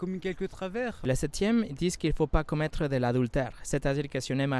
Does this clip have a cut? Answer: yes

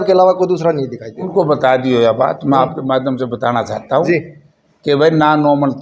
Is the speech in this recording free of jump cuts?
no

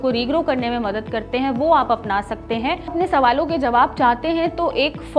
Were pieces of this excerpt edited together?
yes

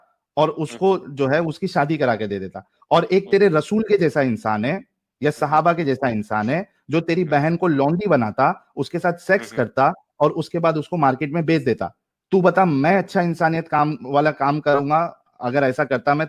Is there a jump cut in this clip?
no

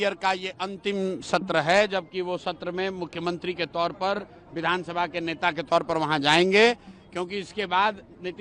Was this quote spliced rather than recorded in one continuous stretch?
no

